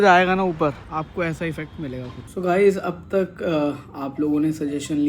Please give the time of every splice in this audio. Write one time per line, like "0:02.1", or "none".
0:00.8
0:02.2

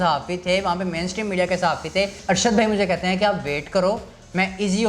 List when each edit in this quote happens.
0:02.2

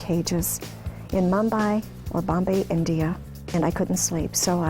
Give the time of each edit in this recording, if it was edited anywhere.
0:03.5

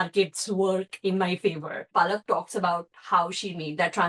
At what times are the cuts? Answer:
0:01.9

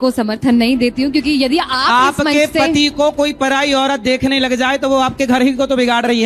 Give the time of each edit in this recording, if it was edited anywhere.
none

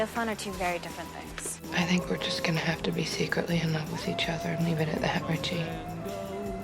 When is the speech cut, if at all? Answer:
0:01.6

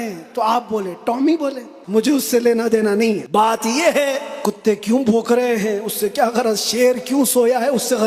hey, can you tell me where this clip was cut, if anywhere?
0:01.7
0:03.2
0:04.3

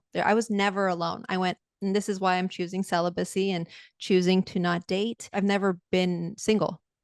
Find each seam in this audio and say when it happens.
0:05.3

